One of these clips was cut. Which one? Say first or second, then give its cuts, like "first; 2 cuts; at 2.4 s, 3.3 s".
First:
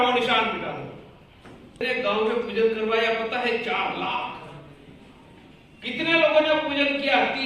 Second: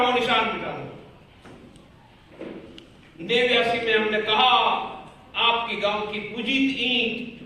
first; 1 cut; at 1.8 s